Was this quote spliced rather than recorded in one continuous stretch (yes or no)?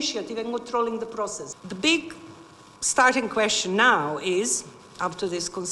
no